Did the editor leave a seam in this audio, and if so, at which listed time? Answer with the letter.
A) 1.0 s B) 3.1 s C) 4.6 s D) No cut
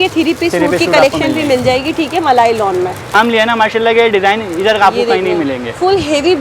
B